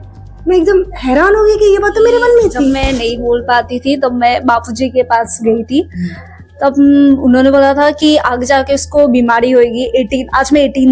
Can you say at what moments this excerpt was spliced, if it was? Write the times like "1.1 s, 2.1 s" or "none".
2.7 s